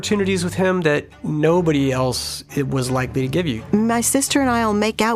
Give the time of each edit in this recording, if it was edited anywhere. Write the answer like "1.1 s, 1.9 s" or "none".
3.6 s